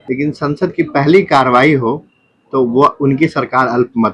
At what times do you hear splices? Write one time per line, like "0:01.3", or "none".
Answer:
none